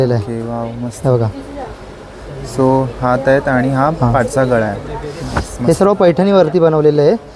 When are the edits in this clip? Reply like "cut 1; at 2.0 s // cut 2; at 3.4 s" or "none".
none